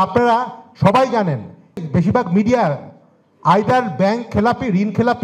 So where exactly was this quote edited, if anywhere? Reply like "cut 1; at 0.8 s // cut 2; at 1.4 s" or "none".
cut 1; at 1.8 s